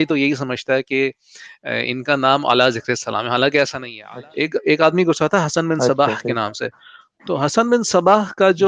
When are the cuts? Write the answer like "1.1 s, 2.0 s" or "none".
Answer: 4.0 s

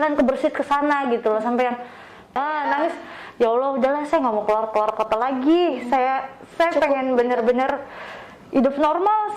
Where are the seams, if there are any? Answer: 2.4 s

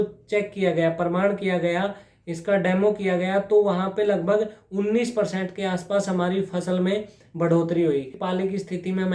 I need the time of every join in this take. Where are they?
8.2 s

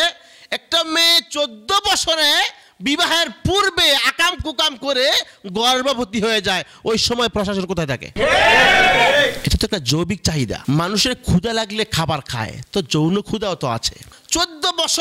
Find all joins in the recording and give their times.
10.6 s

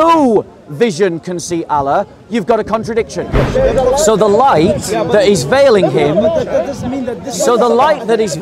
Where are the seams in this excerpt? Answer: 3.4 s

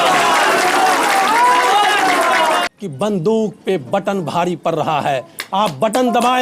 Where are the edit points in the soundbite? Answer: 2.7 s

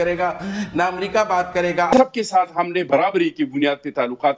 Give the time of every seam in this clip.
1.9 s

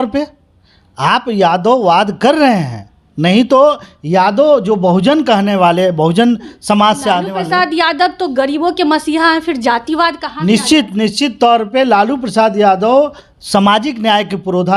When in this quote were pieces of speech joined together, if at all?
none

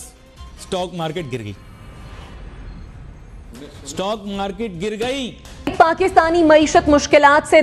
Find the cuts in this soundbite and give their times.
6.0 s

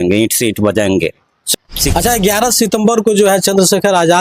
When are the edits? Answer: 1.4 s

